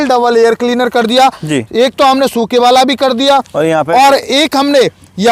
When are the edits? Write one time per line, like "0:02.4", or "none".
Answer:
none